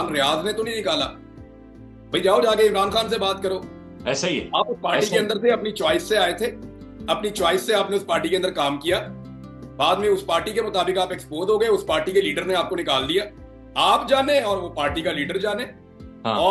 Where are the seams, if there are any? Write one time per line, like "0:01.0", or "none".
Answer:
none